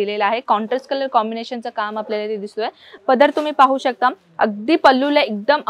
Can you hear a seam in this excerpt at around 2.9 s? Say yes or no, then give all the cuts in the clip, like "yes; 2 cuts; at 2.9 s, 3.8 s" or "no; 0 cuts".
yes; 1 cut; at 2.9 s